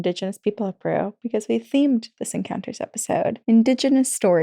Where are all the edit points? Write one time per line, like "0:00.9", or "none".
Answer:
0:03.4